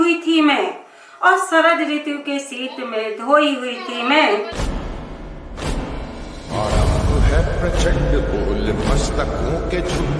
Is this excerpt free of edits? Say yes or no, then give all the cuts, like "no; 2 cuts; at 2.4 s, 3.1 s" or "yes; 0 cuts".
no; 1 cut; at 4.6 s